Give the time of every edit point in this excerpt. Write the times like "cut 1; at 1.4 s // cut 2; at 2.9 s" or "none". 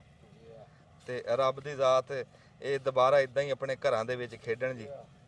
none